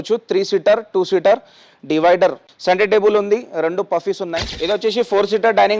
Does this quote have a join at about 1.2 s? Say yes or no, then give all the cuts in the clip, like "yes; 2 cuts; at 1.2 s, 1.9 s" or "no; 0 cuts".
no; 2 cuts; at 2.5 s, 4.5 s